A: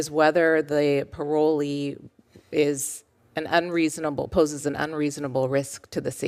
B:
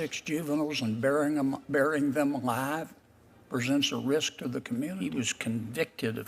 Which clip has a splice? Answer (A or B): B